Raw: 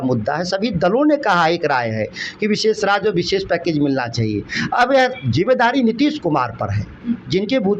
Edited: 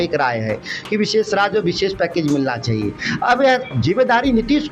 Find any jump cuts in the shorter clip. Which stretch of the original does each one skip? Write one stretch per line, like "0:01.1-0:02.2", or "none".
none